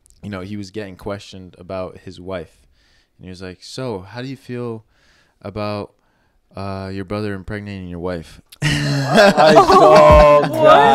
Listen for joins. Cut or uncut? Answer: uncut